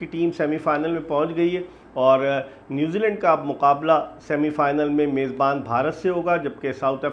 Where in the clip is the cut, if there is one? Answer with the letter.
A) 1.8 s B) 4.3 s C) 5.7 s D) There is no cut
D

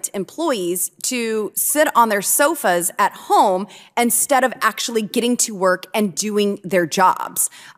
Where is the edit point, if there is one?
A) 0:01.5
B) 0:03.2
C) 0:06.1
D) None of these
D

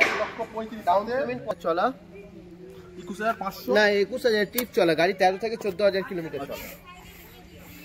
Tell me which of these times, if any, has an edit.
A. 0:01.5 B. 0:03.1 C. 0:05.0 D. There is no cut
A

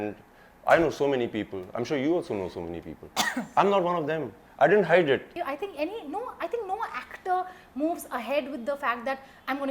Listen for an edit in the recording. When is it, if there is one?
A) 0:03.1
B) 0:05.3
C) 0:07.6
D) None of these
B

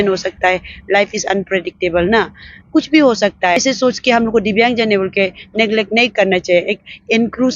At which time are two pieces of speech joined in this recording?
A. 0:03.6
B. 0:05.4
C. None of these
A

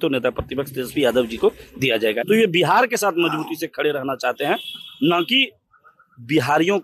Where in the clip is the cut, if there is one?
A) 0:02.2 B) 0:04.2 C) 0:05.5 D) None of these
A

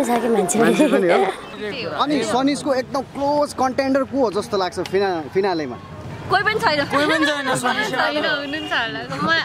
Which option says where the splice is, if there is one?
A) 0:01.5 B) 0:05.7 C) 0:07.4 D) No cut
A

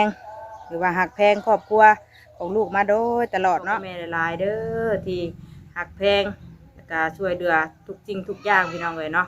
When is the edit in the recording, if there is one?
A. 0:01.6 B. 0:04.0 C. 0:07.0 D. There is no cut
B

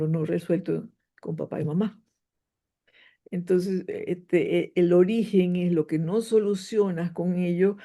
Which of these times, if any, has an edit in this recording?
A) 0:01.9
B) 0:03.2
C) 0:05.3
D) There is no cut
D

